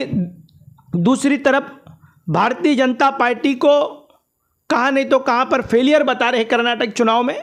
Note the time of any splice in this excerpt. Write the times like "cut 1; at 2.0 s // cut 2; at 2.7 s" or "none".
none